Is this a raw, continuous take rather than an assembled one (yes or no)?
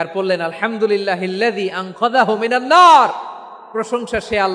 yes